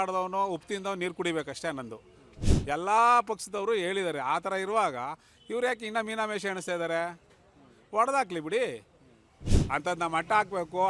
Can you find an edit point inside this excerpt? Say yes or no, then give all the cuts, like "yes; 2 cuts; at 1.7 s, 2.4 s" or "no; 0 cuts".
yes; 2 cuts; at 2.4 s, 9.5 s